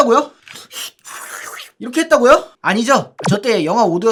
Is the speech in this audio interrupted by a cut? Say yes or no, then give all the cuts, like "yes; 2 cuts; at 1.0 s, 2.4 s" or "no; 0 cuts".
no; 0 cuts